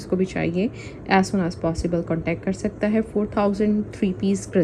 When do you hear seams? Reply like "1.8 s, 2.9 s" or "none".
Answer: none